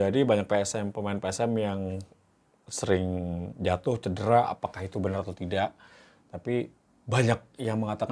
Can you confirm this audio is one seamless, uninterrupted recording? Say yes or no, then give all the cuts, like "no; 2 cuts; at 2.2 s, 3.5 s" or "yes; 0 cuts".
yes; 0 cuts